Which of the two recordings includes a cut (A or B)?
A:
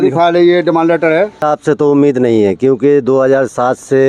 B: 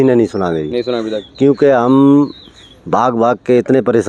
A